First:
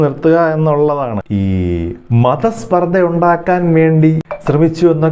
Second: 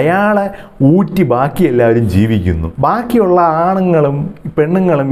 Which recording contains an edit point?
first; 1 cut; at 1.3 s

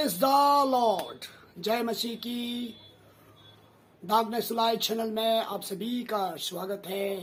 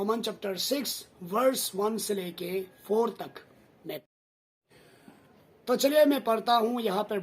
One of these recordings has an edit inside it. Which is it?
second; 1 cut; at 4.0 s

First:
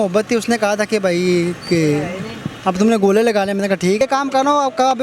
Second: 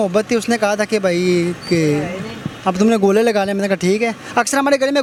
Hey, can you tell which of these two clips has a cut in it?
first; 1 cut; at 4.0 s

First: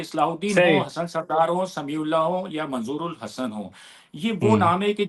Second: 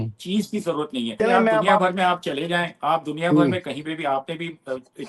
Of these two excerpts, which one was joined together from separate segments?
second; 1 cut; at 1.0 s

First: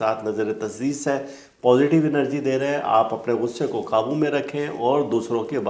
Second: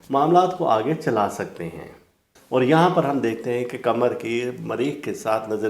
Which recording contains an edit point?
second; 1 cut; at 2.2 s

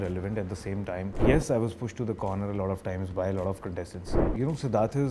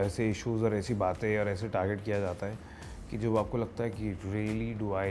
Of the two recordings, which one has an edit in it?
first; 2 cuts; at 1.2 s, 4.2 s

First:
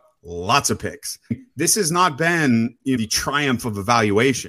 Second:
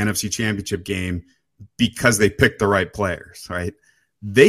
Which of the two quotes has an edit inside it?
first; 2 cuts; at 1.3 s, 3.0 s

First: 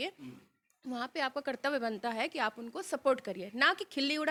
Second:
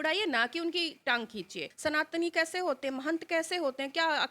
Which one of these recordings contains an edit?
second; 1 cut; at 1.6 s

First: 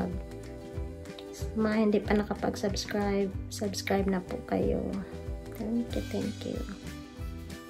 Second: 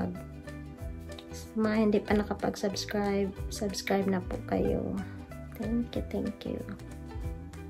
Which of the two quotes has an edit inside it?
second; 1 cut; at 6.8 s

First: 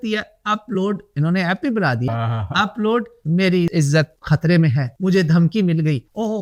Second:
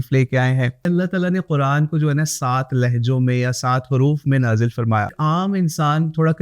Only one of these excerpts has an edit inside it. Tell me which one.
second; 2 cuts; at 0.9 s, 5.1 s

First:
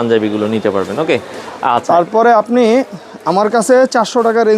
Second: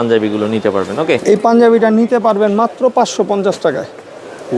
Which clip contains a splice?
second; 1 cut; at 1.2 s

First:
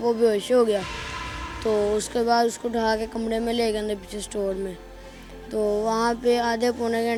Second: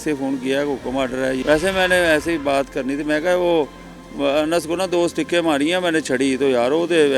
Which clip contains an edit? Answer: second; 1 cut; at 1.4 s

